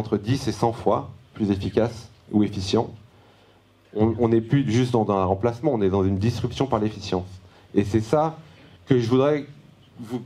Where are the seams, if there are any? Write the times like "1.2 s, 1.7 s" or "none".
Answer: none